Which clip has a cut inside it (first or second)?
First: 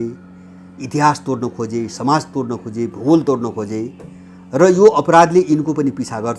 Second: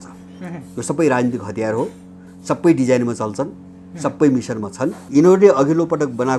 second